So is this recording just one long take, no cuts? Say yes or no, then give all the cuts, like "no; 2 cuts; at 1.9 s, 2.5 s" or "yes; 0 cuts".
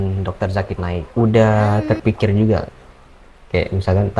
no; 1 cut; at 1.0 s